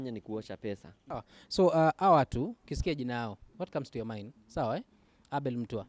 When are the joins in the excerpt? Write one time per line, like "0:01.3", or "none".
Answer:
0:00.9